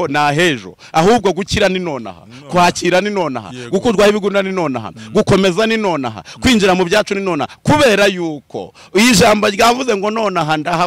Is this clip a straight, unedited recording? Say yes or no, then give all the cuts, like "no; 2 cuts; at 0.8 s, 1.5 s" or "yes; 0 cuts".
yes; 0 cuts